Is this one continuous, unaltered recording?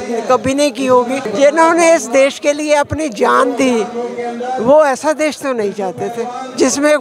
no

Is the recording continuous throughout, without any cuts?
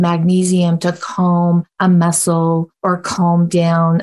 no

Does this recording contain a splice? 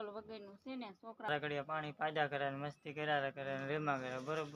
yes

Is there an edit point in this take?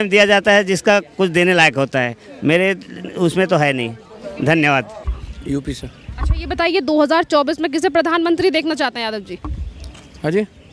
no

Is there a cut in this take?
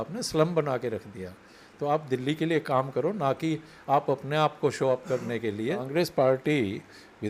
yes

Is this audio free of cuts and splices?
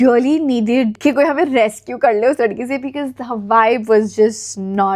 yes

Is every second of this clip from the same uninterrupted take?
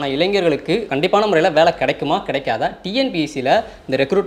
no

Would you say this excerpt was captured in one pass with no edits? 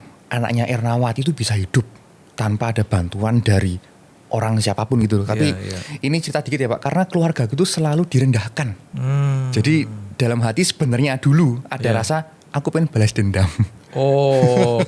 yes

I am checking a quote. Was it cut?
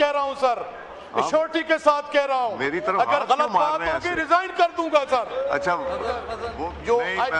yes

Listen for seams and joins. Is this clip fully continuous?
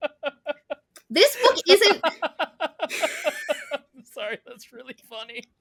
yes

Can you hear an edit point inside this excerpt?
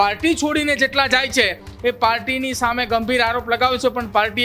no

